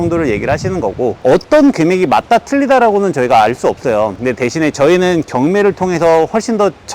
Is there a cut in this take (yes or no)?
yes